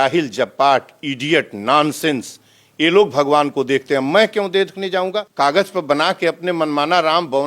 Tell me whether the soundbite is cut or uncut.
cut